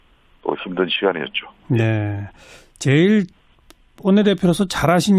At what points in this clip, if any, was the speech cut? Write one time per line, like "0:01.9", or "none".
0:02.0